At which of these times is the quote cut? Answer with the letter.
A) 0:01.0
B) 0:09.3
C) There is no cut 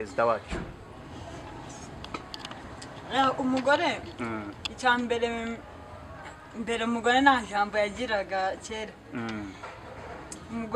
C